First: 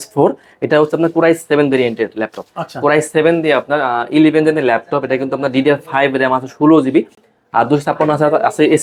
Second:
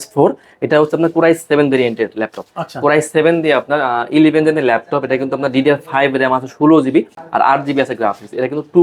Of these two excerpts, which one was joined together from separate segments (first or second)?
second